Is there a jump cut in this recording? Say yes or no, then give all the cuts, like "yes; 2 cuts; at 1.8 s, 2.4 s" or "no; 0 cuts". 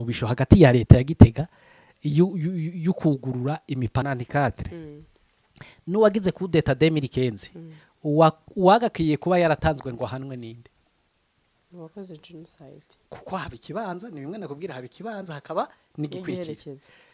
yes; 1 cut; at 4.0 s